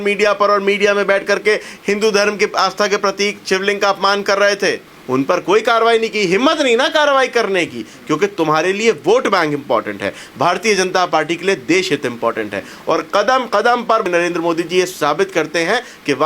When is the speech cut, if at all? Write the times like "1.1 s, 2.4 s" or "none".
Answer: 4.9 s, 14.1 s